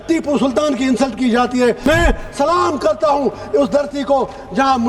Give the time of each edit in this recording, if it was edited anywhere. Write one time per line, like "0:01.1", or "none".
0:01.9